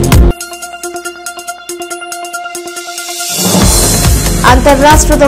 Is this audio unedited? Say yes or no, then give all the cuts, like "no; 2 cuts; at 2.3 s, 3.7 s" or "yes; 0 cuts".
no; 1 cut; at 3.9 s